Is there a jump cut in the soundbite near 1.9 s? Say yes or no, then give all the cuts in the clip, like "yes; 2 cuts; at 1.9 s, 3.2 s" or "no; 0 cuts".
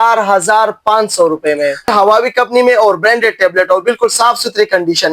yes; 1 cut; at 1.9 s